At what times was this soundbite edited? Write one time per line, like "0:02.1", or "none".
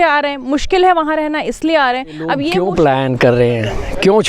0:02.5